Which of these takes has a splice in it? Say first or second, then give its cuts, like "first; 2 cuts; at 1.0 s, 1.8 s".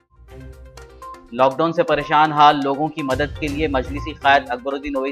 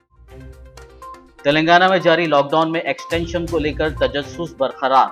first; 1 cut; at 1.1 s